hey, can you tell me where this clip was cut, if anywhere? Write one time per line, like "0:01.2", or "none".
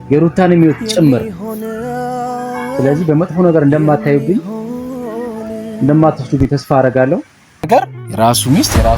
0:07.7